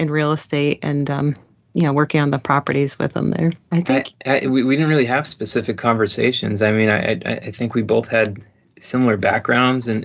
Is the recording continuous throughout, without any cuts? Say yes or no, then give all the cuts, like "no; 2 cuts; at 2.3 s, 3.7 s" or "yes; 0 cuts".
no; 1 cut; at 3.6 s